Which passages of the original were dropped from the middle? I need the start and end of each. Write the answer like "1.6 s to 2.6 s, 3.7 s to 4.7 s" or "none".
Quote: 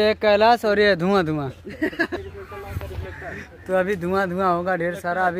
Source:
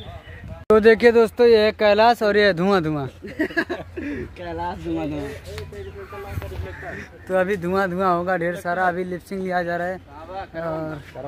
3.8 s to 5.9 s